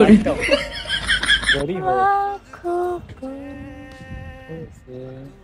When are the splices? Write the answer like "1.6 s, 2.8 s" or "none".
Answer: none